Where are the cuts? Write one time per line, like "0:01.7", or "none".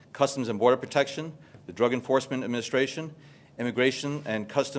0:01.3